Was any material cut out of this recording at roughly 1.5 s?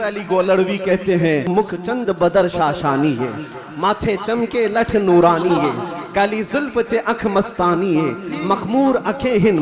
yes; 1 cut; at 1.5 s

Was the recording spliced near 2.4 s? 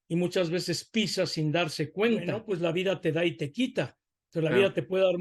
yes; 1 cut; at 2.4 s

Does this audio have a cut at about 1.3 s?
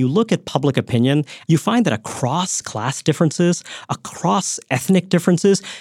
yes; 1 cut; at 1.3 s

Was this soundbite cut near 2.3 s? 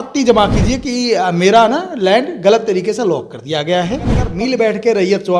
no; 1 cut; at 4.3 s

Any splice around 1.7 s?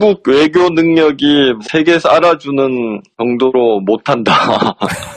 yes; 1 cut; at 1.7 s

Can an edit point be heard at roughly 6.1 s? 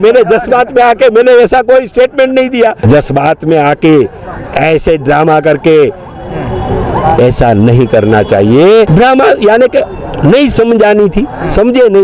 no; 2 cuts; at 2.8 s, 8.9 s

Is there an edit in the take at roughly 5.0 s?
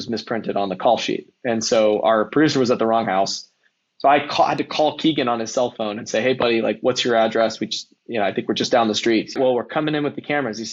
no; 1 cut; at 9.4 s

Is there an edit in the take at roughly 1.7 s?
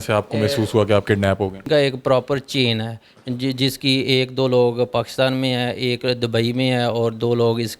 yes; 1 cut; at 1.7 s

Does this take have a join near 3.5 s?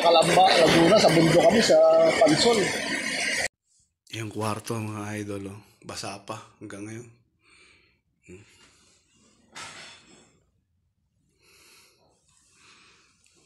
yes; 1 cut; at 3.5 s

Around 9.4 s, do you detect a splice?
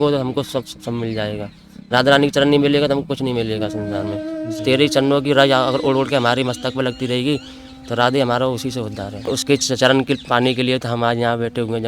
yes; 2 cuts; at 4.4 s, 9.4 s

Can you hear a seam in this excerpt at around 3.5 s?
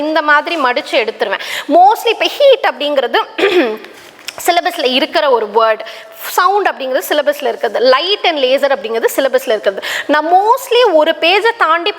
no; 0 cuts

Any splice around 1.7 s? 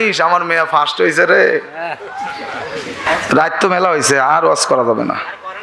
no; 1 cut; at 3.0 s

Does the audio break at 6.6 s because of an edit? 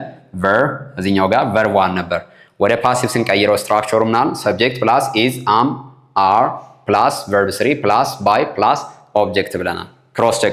no; 0 cuts

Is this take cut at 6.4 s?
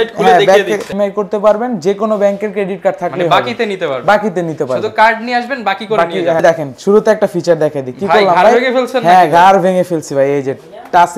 yes; 2 cuts; at 0.9 s, 6.4 s

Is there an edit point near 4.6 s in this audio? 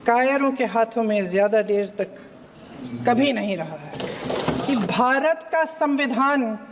yes; 1 cut; at 4.6 s

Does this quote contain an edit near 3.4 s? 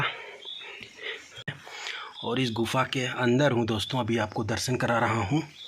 no; 1 cut; at 1.6 s

